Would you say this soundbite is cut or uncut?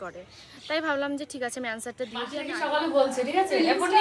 cut